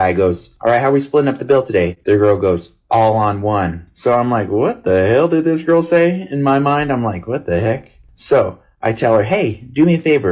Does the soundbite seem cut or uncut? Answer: uncut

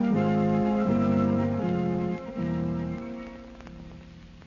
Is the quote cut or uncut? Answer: uncut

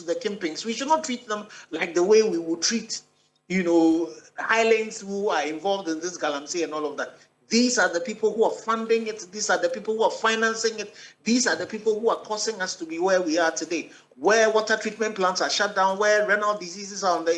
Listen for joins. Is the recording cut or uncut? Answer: uncut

